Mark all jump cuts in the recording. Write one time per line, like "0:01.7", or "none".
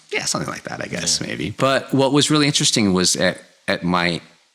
0:01.5